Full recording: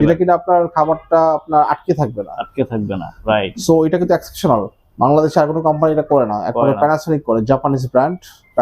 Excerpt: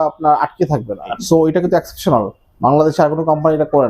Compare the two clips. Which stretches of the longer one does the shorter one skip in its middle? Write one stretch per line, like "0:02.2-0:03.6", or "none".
0:02.4-0:03.5